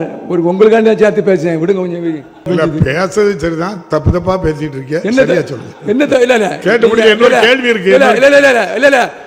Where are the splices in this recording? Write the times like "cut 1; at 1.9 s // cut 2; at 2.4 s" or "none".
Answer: cut 1; at 2.5 s